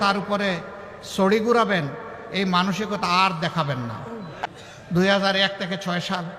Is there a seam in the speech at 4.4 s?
yes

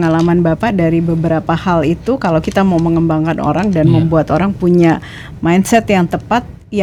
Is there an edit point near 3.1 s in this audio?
no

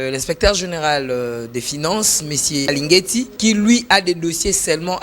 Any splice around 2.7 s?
yes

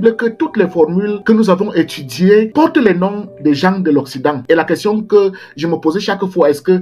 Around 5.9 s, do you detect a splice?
no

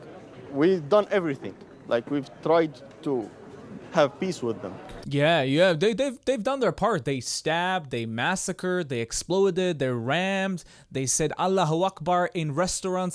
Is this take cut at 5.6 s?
no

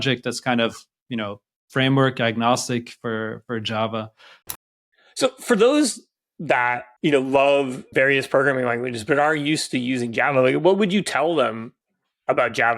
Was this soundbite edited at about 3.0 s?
no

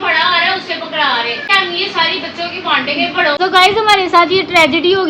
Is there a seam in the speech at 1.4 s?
yes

